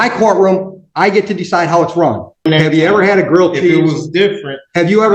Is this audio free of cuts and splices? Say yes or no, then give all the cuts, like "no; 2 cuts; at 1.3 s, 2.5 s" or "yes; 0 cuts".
no; 1 cut; at 2.5 s